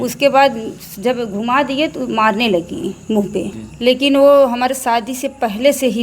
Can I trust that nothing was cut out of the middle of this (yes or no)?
no